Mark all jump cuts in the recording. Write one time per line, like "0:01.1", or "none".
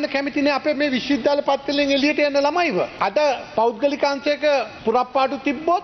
0:02.9
0:04.7